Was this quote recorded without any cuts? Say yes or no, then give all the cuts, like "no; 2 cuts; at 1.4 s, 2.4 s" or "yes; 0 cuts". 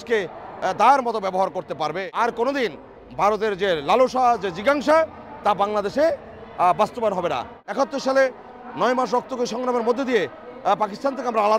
no; 2 cuts; at 2.1 s, 7.6 s